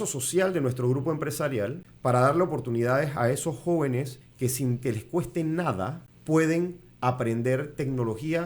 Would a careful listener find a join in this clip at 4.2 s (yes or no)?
yes